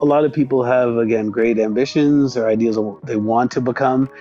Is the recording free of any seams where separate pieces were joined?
yes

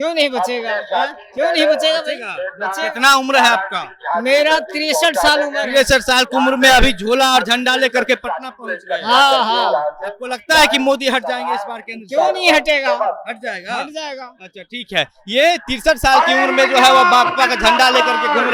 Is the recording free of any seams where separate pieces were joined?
yes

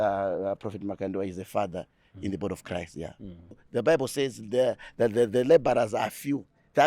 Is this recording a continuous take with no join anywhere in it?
no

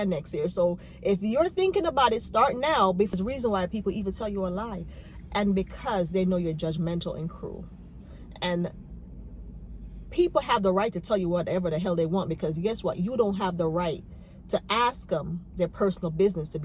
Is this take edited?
yes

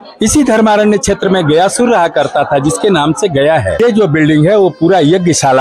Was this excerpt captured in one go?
no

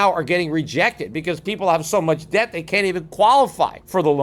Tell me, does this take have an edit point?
no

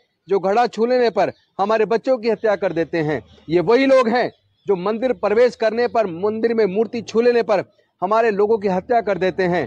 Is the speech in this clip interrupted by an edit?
no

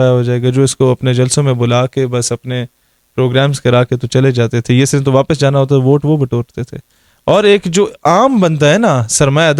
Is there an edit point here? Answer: no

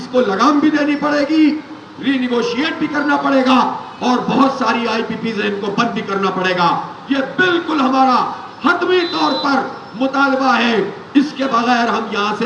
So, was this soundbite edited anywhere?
no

